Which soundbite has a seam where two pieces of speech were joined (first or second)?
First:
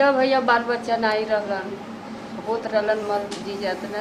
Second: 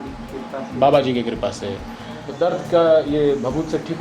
second